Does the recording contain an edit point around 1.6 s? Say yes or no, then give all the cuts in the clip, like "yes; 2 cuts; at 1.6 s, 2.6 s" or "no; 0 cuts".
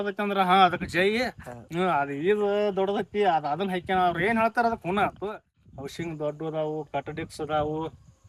no; 1 cut; at 5.5 s